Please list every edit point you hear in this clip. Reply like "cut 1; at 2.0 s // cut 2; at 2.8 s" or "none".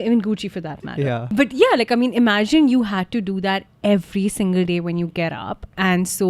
cut 1; at 1.0 s